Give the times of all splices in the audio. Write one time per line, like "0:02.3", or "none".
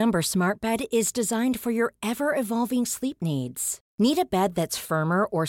none